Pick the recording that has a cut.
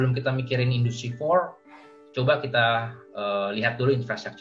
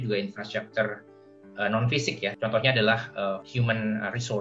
second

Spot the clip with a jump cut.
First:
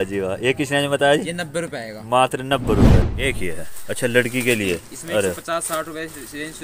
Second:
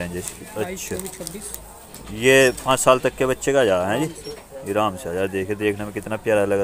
first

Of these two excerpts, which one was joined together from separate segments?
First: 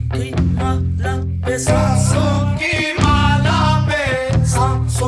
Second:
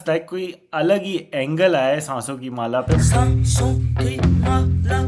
second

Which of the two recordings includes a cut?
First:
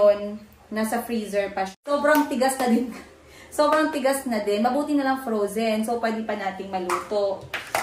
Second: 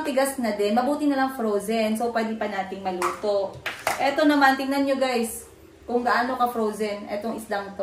first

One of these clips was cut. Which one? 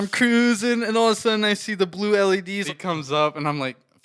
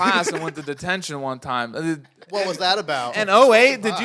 first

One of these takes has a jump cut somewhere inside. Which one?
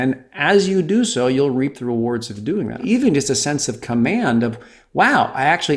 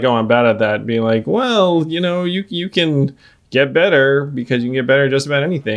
first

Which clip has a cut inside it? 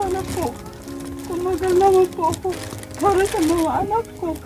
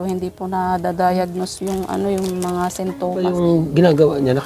second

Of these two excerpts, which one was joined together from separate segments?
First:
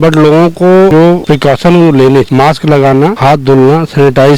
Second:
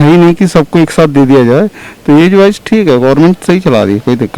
first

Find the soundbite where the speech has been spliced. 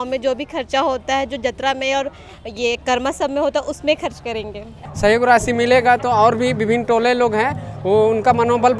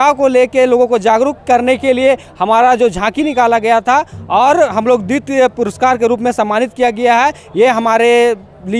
first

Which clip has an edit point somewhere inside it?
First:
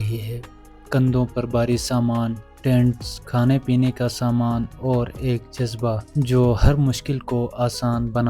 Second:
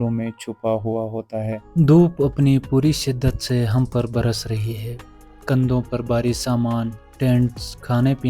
second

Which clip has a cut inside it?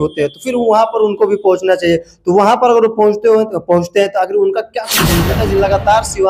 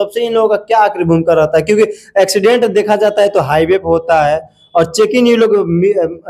first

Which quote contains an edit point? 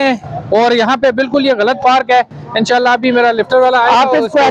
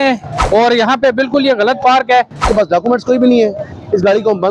second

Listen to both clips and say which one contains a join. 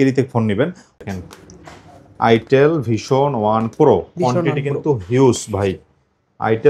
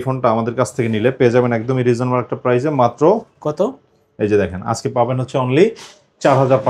first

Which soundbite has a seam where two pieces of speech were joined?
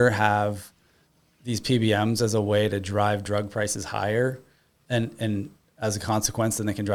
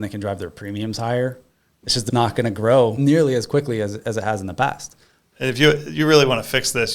second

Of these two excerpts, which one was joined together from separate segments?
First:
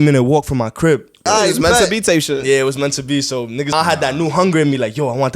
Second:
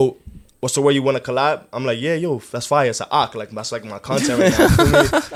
first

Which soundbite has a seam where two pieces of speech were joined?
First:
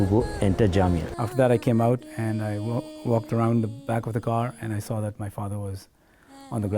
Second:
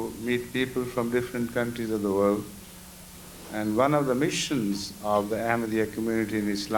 first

